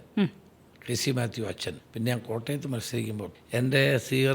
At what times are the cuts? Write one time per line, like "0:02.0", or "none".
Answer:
0:01.8
0:03.3